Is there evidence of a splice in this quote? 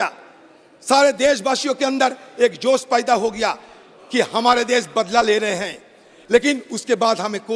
no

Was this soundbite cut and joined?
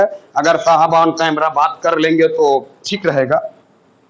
no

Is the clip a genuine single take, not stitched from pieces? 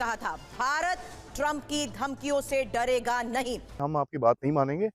no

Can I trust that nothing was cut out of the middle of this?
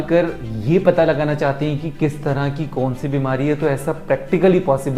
yes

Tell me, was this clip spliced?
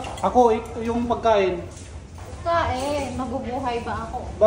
no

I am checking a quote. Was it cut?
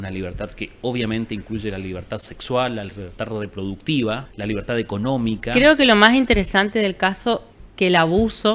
yes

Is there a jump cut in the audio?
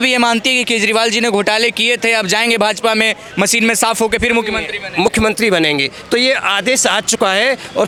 no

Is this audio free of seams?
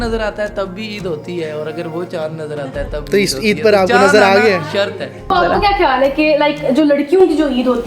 no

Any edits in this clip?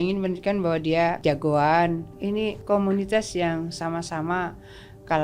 yes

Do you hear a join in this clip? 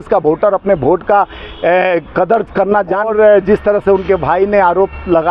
yes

